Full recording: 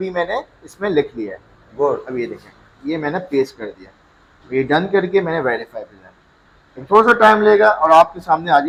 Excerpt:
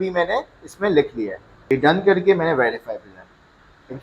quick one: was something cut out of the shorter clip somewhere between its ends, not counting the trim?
yes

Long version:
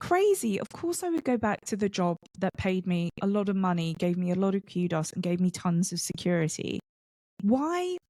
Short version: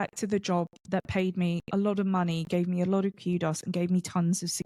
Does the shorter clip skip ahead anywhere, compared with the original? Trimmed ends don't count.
no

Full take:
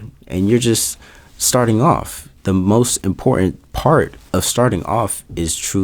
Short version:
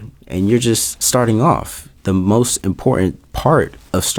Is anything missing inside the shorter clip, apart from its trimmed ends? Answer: yes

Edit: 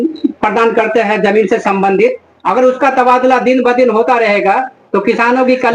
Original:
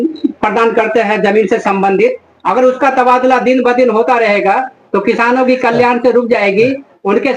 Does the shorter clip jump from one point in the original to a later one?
no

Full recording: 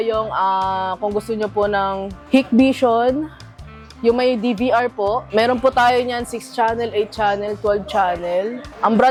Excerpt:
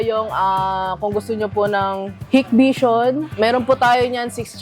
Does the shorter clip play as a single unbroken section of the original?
no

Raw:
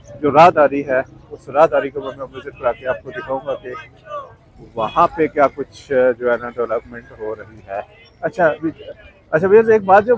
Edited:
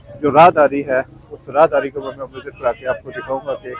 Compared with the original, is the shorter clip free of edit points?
yes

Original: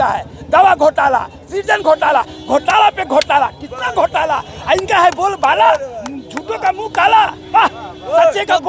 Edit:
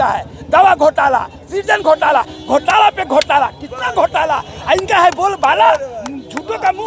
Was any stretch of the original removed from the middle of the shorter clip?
no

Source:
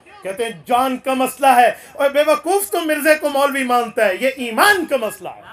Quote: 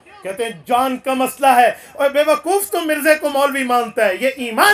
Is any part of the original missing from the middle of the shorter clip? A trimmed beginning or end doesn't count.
no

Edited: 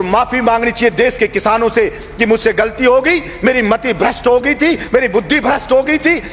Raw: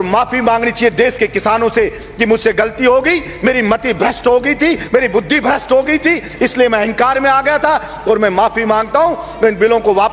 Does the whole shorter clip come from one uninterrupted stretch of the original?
yes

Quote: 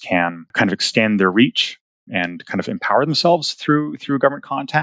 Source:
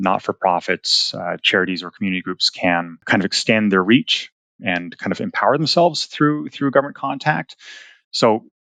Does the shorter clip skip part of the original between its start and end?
no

